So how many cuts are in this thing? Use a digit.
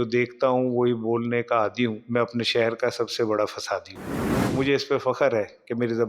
2